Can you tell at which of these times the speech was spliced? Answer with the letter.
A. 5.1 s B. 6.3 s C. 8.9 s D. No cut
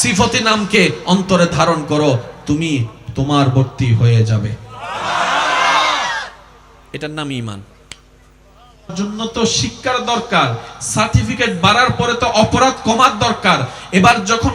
C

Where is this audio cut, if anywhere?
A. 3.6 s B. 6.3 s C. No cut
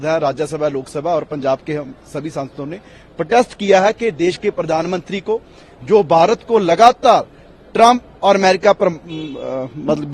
C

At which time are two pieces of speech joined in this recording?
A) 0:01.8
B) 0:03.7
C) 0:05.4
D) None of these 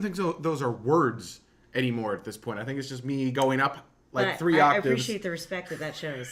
D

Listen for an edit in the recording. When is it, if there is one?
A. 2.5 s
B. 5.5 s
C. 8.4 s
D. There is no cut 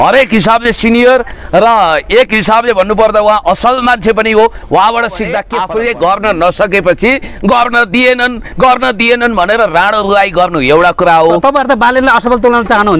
B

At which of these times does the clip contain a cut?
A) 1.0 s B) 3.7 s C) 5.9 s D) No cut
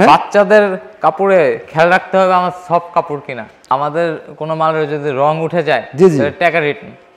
B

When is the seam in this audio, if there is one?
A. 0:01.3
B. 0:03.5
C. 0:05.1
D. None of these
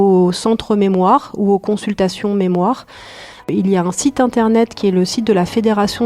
B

